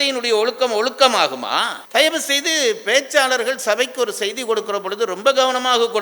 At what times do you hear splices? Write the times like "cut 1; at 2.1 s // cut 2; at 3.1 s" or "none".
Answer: cut 1; at 1.8 s